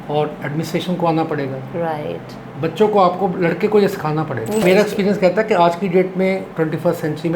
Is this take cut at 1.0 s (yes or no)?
no